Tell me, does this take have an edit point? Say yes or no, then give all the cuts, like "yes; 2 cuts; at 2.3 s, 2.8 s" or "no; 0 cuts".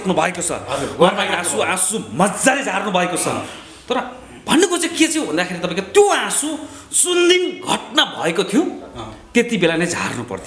no; 0 cuts